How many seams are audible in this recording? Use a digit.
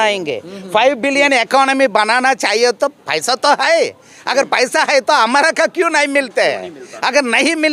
0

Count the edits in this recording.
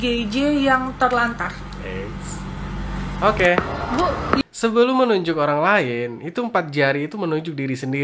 1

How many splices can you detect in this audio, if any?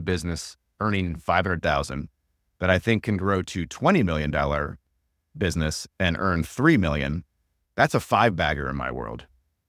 0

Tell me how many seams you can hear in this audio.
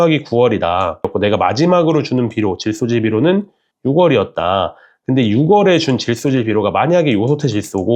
1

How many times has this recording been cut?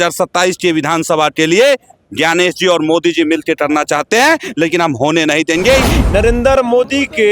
1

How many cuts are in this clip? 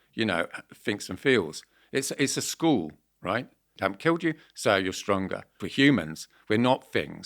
2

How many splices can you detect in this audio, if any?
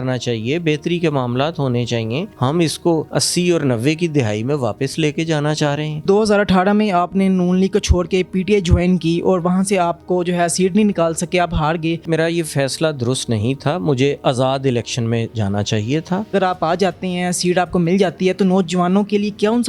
5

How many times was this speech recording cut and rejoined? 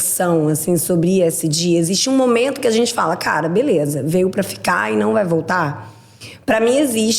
0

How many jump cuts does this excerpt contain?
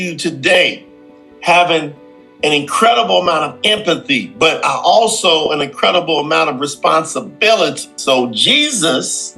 1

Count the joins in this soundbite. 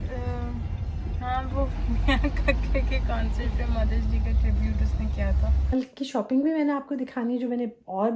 1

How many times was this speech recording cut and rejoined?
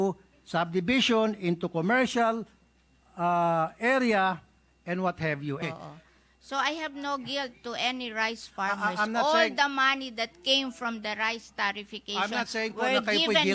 1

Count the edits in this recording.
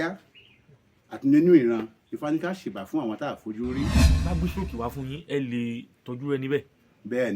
1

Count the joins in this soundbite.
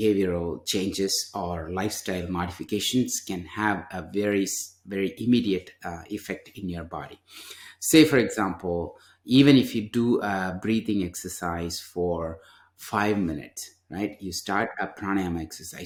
0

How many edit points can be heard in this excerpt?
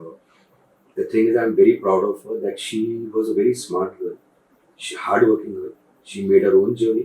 0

